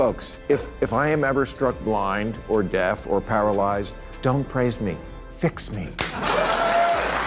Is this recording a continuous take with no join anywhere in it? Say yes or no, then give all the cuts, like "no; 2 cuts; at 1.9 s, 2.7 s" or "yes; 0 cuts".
yes; 0 cuts